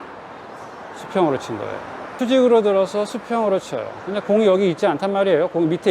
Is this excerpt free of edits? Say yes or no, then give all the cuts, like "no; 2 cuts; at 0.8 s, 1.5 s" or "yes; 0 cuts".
yes; 0 cuts